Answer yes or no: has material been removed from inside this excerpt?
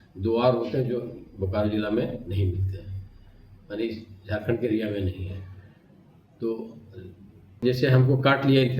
yes